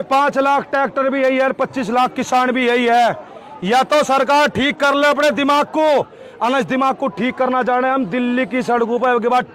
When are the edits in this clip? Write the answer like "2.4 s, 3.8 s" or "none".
none